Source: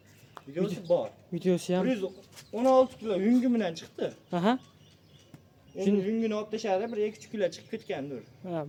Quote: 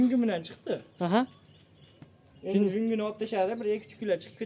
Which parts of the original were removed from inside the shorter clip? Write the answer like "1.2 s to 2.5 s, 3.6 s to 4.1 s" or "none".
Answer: none